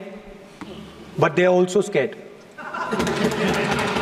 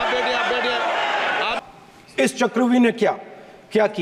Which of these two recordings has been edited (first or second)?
second